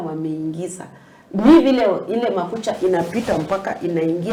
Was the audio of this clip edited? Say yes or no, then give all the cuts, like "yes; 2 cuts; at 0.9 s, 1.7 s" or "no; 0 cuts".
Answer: no; 0 cuts